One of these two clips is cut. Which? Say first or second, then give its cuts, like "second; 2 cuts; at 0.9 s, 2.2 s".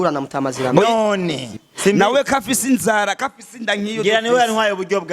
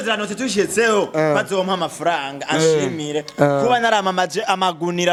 first; 1 cut; at 1.5 s